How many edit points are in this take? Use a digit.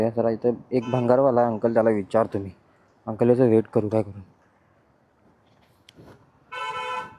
0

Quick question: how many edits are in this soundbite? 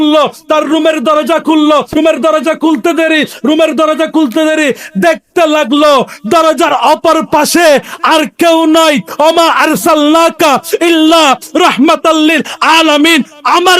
1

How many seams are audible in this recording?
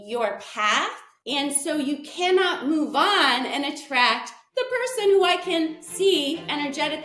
1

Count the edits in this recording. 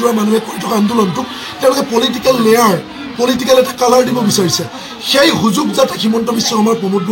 0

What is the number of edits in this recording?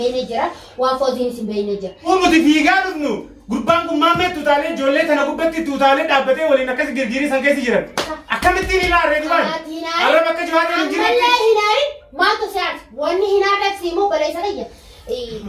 1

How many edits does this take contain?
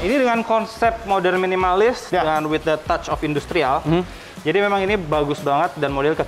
0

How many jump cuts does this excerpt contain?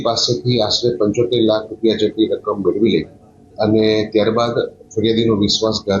0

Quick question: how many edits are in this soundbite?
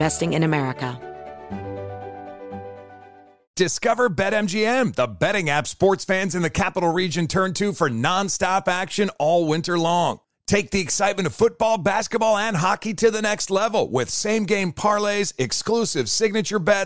1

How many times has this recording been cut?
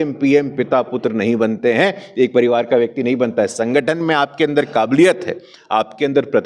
0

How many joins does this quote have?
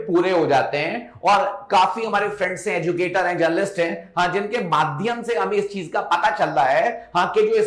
0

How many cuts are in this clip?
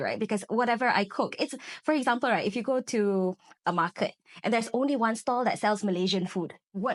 0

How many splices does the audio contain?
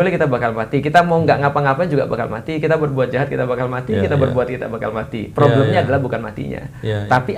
0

